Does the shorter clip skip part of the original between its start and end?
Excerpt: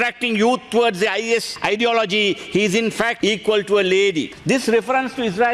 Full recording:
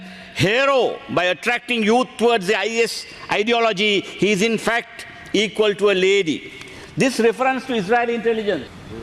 yes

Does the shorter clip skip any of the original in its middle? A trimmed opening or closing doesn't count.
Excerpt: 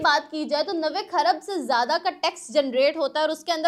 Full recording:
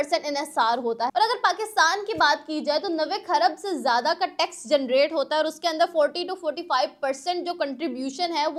no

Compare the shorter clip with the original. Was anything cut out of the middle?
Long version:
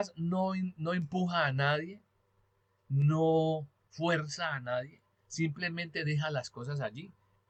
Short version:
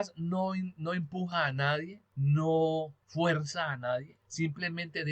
yes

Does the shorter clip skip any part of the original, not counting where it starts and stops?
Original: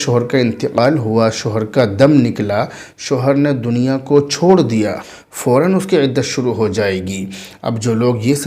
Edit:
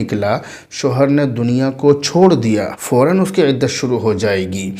yes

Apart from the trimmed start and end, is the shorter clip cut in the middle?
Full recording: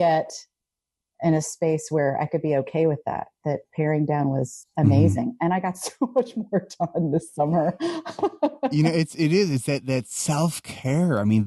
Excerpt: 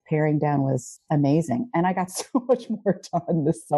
no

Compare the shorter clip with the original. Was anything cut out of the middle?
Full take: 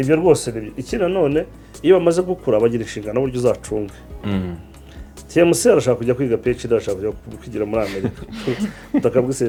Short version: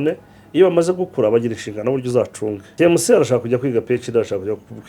yes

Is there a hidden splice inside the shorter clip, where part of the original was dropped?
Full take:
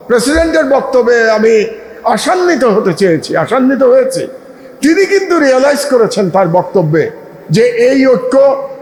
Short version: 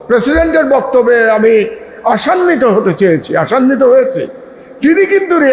no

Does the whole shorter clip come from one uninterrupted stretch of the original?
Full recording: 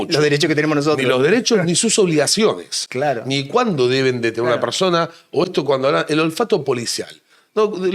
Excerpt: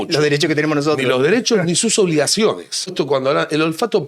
no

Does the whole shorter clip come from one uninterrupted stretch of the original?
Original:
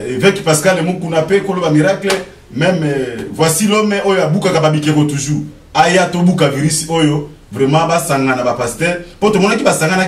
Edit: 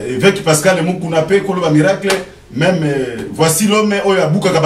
yes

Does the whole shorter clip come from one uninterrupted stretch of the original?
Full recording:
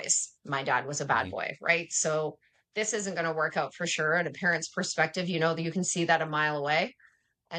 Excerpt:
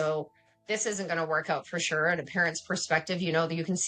yes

